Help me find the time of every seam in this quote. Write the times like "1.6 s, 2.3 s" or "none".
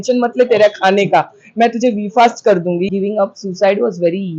2.9 s